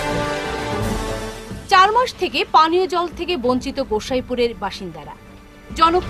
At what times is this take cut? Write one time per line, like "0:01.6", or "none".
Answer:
0:01.0